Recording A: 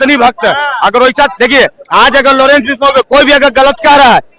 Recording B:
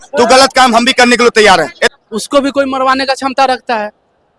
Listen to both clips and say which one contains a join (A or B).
B